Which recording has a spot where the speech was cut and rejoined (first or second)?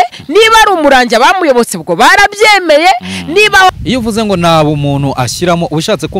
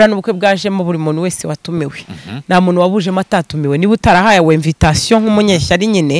first